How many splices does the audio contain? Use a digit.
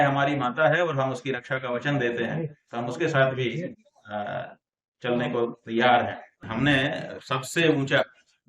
1